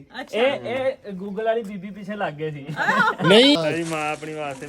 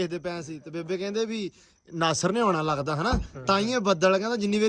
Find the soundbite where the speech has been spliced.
first; 1 cut; at 3.6 s

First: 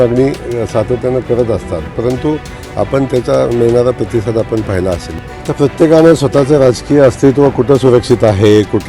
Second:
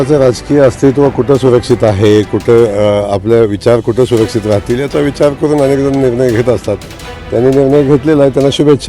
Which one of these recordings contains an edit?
first; 1 cut; at 5.1 s

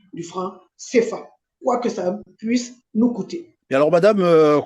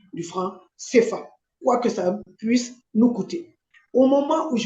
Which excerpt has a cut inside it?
second; 1 cut; at 3.6 s

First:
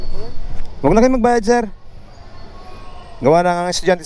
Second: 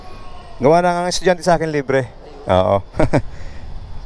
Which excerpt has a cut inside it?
second; 1 cut; at 2.6 s

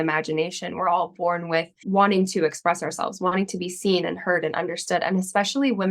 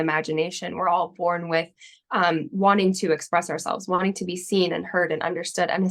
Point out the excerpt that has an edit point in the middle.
first; 1 cut; at 1.8 s

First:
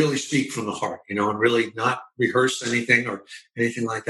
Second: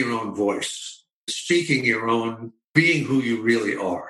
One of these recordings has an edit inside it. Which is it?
second; 2 cuts; at 1.3 s, 2.7 s

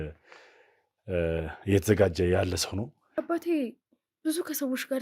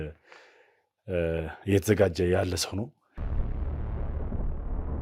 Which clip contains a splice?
first; 1 cut; at 3.0 s

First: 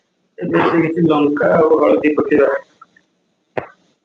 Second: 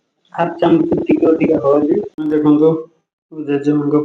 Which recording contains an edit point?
second; 1 cut; at 2.1 s

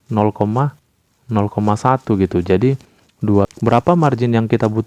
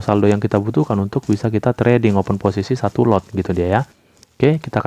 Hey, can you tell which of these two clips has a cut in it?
first; 1 cut; at 3.5 s

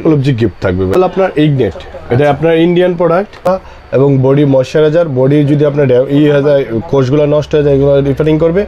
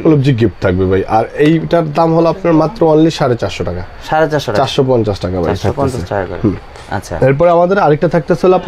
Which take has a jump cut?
first; 2 cuts; at 0.9 s, 3.5 s

